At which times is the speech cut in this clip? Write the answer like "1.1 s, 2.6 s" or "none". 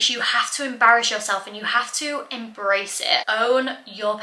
3.2 s